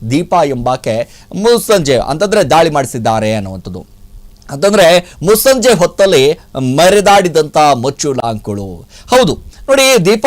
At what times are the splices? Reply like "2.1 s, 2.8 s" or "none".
none